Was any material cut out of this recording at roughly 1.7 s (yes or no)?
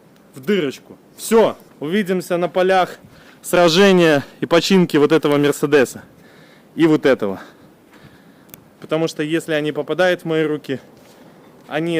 yes